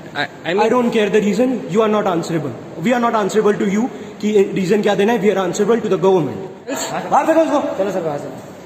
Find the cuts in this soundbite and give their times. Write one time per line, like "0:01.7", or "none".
0:06.8